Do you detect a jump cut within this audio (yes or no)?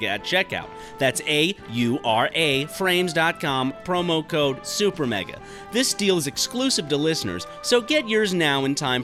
no